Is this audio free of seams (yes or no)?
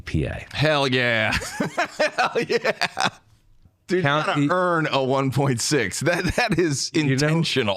no